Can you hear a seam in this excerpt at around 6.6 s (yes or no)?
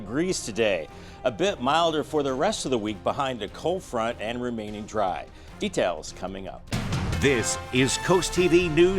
yes